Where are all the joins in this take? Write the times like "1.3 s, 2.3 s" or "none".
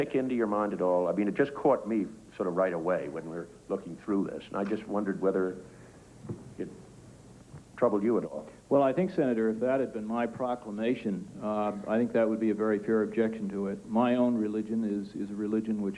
none